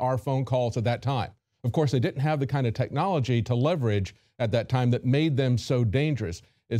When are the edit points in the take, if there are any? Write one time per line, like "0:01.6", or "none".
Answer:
0:05.3